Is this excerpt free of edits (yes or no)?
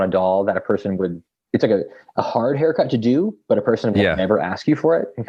yes